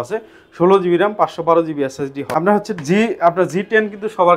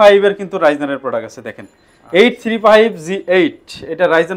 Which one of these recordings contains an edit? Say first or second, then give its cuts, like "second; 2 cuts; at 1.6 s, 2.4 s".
first; 1 cut; at 2.2 s